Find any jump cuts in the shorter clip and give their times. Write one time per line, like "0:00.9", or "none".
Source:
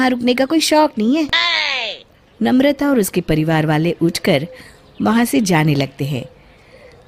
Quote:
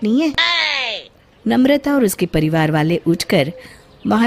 none